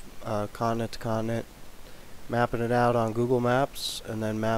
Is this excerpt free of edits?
no; 1 cut; at 3.4 s

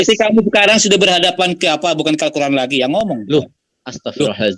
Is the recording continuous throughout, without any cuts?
yes; 0 cuts

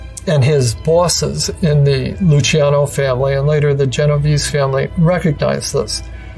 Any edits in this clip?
no; 0 cuts

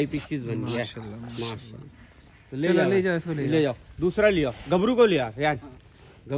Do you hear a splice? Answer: no; 0 cuts

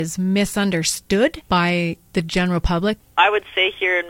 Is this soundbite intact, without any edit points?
no; 2 cuts; at 1.4 s, 3.0 s

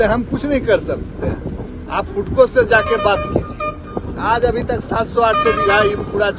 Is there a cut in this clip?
no; 0 cuts

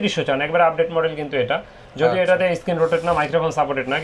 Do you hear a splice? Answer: no; 0 cuts

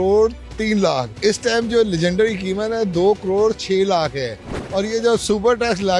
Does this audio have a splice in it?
yes; 1 cut; at 1.1 s

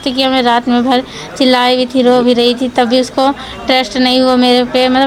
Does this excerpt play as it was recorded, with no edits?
yes; 0 cuts

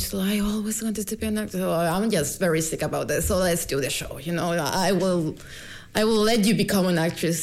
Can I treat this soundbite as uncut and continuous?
yes; 0 cuts

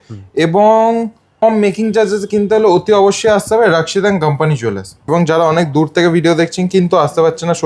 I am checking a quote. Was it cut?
yes; 2 cuts; at 1.4 s, 5.1 s

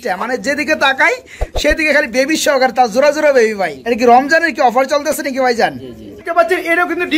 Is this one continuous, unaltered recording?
no; 2 cuts; at 3.8 s, 6.2 s

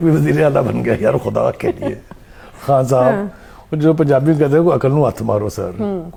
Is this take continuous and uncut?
yes; 0 cuts

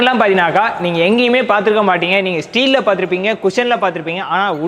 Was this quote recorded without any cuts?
yes; 0 cuts

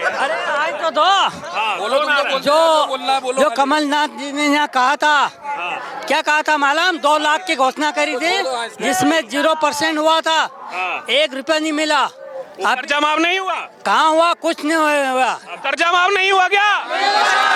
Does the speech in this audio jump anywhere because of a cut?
no; 0 cuts

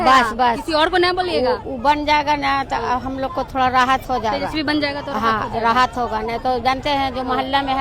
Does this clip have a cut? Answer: no; 0 cuts

